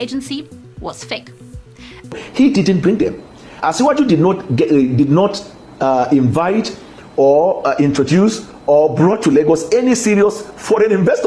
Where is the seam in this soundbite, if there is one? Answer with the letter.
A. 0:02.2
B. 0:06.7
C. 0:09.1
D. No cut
A